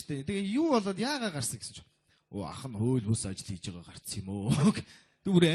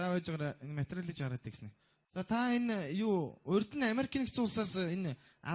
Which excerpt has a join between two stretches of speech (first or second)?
second